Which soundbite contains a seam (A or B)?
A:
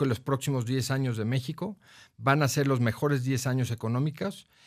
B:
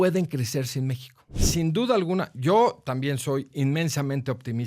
B